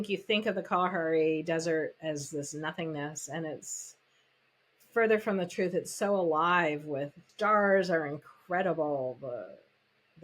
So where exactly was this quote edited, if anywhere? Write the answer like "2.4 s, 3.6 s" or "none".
7.2 s